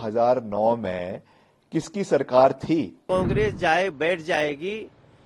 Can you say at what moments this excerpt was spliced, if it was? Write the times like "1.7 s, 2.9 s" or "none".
3.0 s